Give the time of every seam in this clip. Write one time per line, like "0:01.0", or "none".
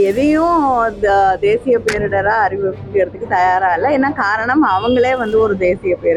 none